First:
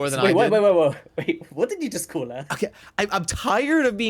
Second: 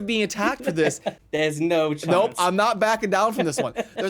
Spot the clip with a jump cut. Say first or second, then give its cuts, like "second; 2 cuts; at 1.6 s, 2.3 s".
second; 1 cut; at 1.1 s